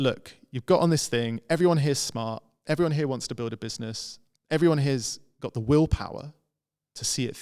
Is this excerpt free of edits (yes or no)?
yes